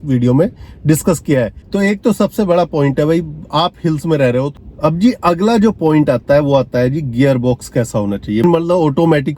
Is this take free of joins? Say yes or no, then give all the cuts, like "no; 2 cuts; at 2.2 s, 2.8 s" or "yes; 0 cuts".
no; 3 cuts; at 1.6 s, 4.5 s, 8.4 s